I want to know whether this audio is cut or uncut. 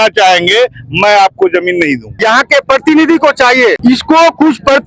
cut